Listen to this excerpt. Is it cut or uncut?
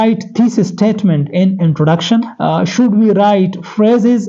cut